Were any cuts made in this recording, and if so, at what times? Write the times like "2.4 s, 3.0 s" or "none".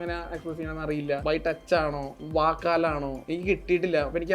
1.2 s, 2.1 s, 3.2 s